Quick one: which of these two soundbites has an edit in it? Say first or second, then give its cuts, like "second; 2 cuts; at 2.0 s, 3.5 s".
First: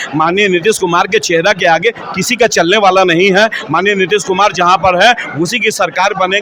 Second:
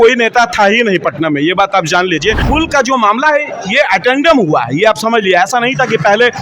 second; 1 cut; at 2.4 s